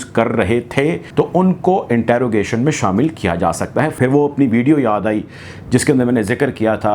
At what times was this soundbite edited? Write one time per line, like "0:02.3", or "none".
0:01.0
0:04.0

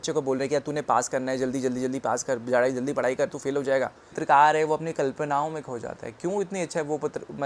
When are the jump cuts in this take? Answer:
0:04.2

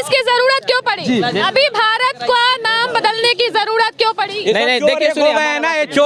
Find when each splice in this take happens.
none

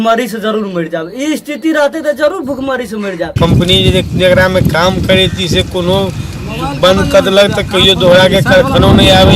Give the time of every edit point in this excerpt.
0:03.3

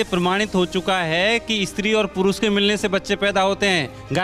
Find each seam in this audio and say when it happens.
none

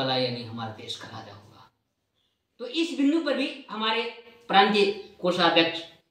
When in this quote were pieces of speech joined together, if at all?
none

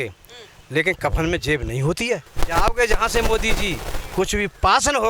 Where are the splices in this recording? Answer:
0:02.3

